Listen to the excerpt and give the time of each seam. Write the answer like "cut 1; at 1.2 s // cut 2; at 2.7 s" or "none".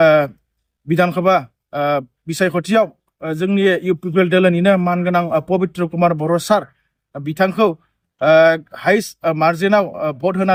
none